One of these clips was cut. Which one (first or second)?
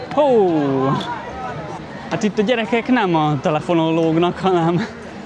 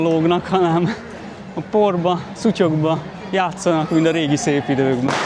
first